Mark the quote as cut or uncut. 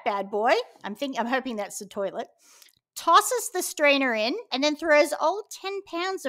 cut